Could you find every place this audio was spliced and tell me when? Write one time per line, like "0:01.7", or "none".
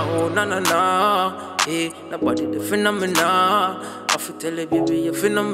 none